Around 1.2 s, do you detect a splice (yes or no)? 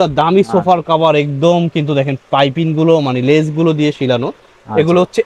no